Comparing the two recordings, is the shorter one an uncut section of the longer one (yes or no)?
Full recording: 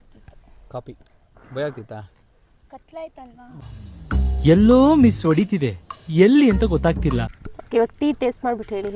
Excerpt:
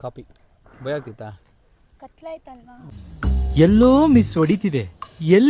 no